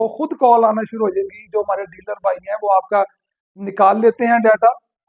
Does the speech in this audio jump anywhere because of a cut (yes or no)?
no